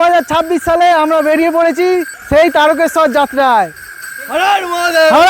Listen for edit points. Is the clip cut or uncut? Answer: cut